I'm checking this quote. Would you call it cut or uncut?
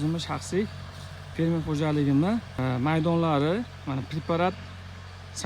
cut